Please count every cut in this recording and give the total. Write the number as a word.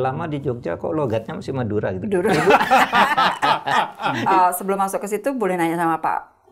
one